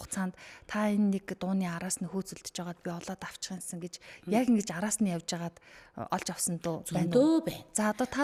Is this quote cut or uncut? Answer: uncut